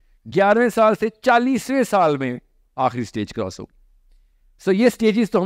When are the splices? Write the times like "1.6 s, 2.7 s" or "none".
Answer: none